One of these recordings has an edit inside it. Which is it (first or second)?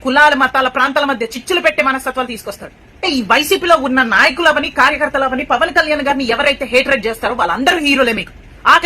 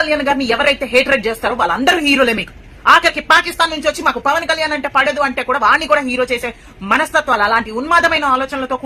first